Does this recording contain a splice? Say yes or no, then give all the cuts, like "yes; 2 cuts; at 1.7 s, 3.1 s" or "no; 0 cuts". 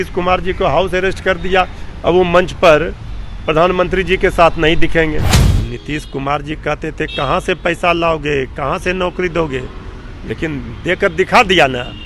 yes; 1 cut; at 5.4 s